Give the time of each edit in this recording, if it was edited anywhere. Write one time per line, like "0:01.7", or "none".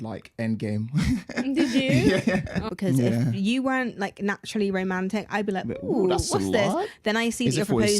0:02.6